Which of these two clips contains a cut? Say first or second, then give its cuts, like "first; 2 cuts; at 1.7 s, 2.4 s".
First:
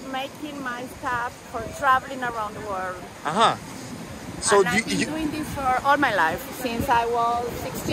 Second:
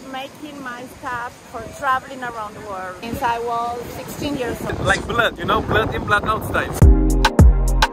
second; 3 cuts; at 3.0 s, 4.7 s, 6.7 s